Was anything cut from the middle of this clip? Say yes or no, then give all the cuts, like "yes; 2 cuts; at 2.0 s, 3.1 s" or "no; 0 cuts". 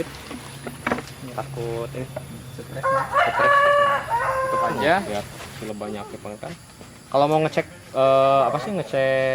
yes; 1 cut; at 5.1 s